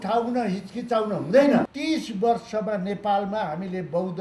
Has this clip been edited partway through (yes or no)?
yes